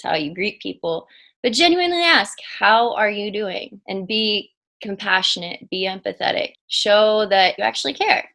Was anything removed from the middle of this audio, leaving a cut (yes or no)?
yes